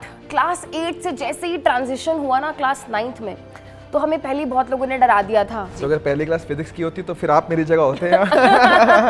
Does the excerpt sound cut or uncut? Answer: cut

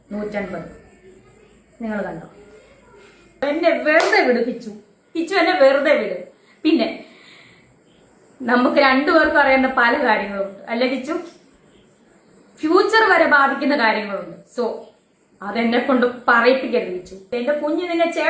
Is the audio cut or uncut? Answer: cut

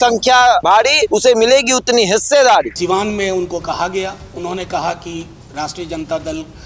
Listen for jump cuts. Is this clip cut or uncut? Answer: cut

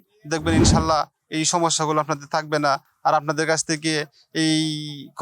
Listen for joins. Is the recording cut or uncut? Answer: uncut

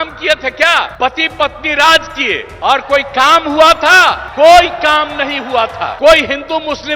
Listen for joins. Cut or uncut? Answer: cut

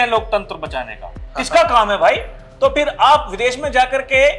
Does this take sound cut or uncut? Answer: uncut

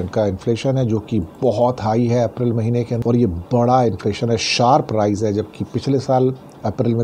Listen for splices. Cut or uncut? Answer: cut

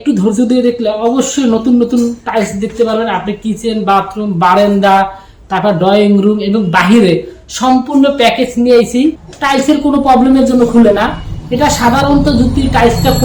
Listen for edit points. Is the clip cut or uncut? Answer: cut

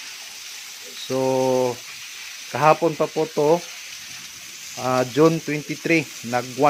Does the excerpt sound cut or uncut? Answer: uncut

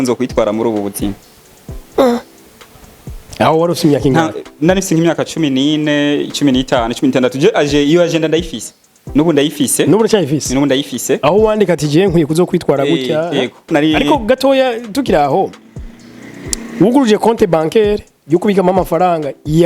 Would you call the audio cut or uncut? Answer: cut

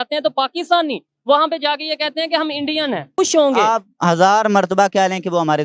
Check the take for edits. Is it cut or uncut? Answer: cut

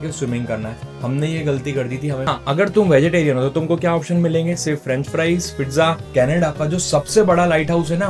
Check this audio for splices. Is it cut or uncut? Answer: cut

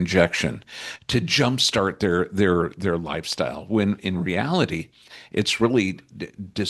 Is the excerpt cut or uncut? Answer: uncut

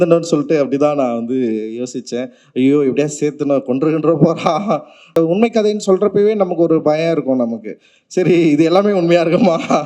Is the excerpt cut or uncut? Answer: cut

